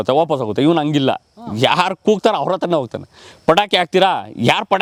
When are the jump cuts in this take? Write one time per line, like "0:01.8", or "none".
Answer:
none